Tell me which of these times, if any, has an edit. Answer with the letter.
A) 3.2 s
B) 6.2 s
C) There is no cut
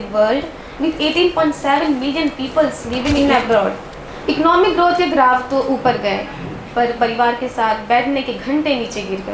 A